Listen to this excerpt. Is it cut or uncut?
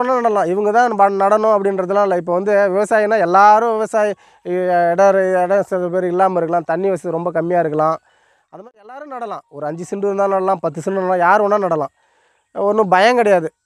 uncut